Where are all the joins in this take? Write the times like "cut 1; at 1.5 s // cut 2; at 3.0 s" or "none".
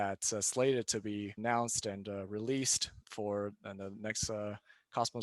cut 1; at 1.3 s // cut 2; at 3.0 s

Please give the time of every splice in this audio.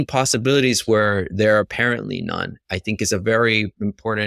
none

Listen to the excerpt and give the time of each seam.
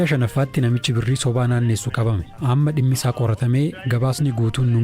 cut 1; at 2.3 s

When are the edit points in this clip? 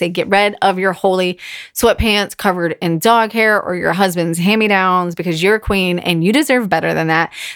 none

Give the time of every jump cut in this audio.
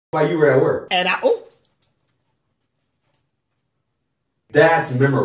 none

